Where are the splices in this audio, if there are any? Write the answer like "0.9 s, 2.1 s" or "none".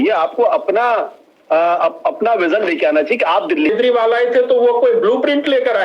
3.7 s

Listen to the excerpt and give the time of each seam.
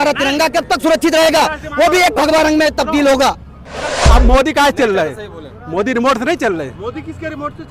4.0 s

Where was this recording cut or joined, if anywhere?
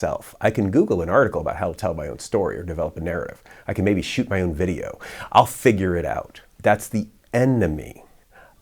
6.5 s

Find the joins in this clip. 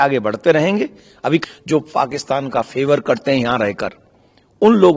1.4 s

